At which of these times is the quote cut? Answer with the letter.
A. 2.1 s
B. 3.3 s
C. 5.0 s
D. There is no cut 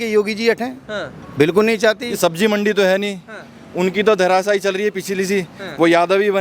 A